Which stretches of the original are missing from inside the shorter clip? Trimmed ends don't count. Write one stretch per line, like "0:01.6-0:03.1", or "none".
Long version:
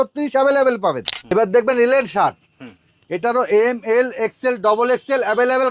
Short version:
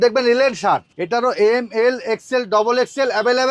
0:02.5-0:03.1